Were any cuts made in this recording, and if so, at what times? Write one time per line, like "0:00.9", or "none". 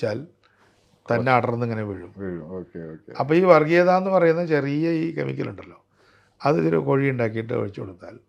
none